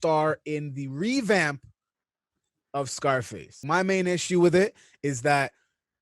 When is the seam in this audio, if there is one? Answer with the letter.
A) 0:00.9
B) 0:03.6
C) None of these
B